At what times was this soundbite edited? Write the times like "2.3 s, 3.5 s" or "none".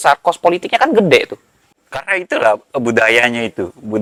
none